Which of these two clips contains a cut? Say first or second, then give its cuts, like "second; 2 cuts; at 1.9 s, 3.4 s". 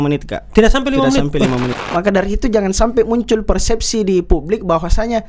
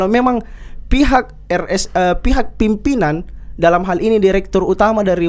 first; 1 cut; at 1.8 s